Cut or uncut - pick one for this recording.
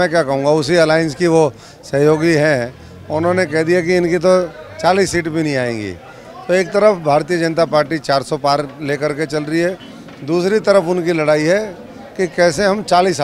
uncut